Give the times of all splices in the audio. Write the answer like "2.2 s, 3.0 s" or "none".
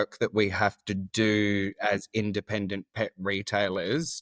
none